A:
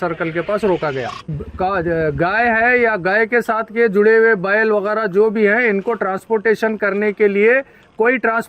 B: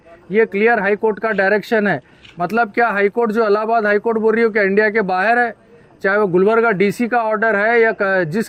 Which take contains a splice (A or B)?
A